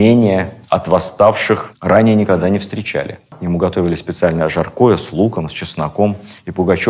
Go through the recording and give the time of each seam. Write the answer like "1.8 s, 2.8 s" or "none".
3.4 s